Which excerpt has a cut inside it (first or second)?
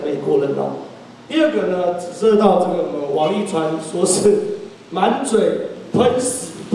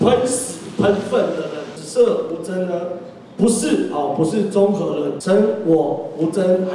second